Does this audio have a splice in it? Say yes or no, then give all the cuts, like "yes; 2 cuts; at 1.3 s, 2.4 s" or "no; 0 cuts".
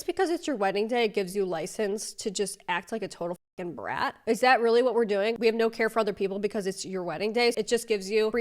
yes; 1 cut; at 5.4 s